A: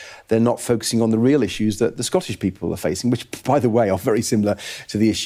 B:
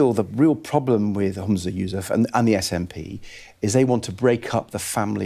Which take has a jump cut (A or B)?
B